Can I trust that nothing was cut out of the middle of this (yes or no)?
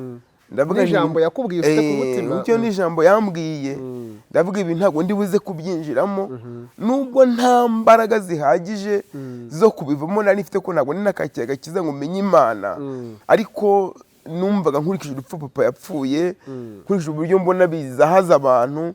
yes